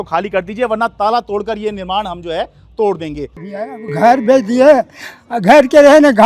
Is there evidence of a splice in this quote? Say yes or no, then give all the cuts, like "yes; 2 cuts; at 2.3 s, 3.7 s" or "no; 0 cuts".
yes; 1 cut; at 3.7 s